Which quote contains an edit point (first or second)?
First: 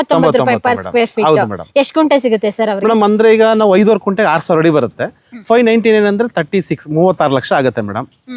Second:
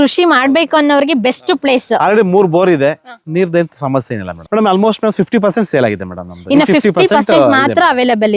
second